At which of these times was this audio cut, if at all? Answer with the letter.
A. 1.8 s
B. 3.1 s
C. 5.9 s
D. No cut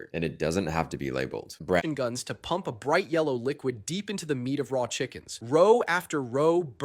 A